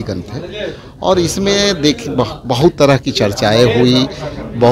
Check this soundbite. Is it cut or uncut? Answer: uncut